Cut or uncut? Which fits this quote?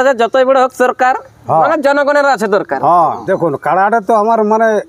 cut